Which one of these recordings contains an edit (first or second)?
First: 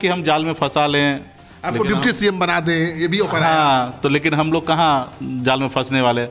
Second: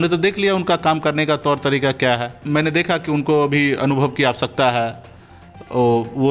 second